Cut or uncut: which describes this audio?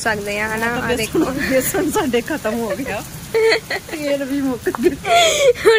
uncut